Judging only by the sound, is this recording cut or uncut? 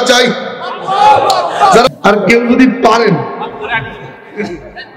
cut